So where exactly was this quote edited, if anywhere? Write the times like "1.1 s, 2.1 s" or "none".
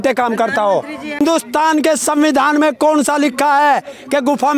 1.2 s